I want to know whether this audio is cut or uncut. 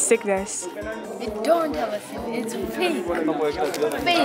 uncut